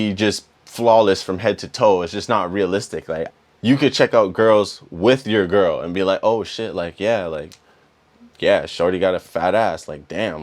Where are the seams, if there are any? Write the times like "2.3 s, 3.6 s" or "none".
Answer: 3.3 s